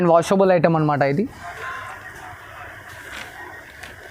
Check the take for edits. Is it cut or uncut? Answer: uncut